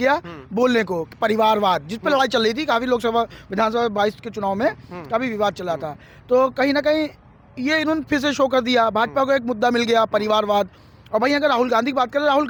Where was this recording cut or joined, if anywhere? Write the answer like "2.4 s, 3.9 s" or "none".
none